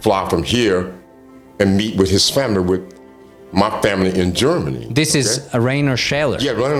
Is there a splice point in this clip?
no; 0 cuts

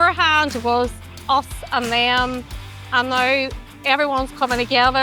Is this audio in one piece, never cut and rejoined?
yes; 0 cuts

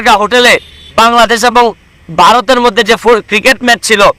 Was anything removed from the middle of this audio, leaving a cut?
no; 0 cuts

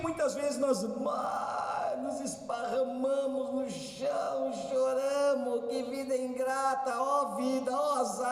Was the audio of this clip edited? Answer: no; 0 cuts

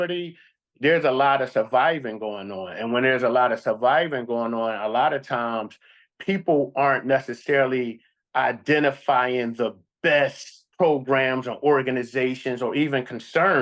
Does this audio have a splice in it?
no; 0 cuts

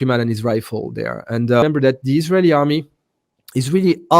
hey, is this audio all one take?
no; 1 cut; at 1.6 s

